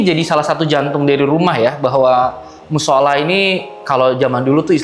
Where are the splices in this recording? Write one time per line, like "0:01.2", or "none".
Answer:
none